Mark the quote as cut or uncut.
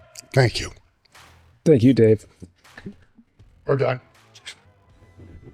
uncut